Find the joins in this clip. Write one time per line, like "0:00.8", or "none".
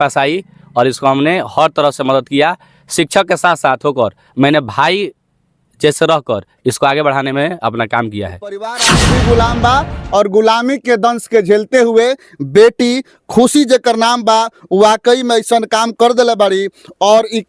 0:09.0